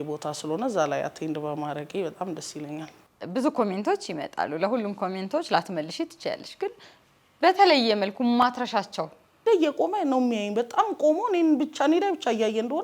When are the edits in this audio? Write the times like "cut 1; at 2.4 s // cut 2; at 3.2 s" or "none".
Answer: cut 1; at 3.1 s // cut 2; at 9.4 s

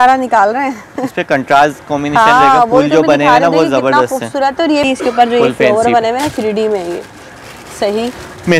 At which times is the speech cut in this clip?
cut 1; at 4.9 s

